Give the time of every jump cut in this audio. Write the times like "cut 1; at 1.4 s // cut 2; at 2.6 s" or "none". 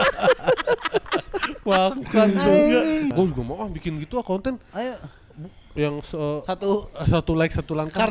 cut 1; at 3.1 s